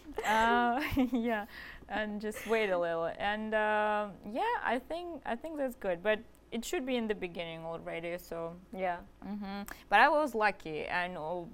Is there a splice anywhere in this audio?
no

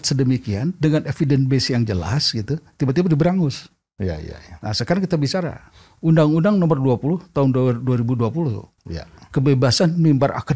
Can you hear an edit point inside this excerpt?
no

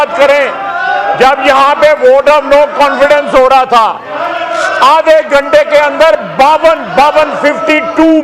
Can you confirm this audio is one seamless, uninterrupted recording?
yes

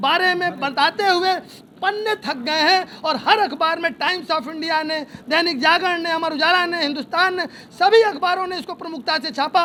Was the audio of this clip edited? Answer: no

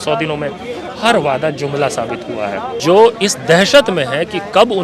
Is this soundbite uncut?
no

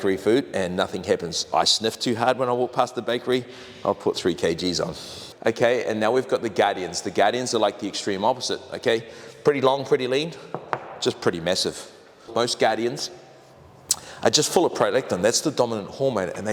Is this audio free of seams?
yes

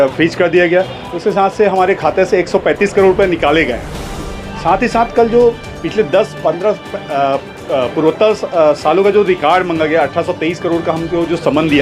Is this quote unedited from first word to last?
yes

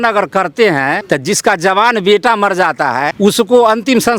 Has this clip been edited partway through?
yes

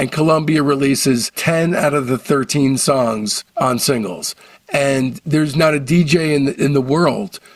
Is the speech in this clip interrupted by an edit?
no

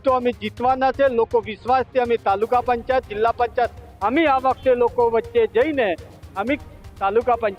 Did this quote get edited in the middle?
no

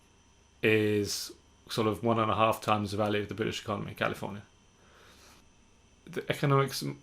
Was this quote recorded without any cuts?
no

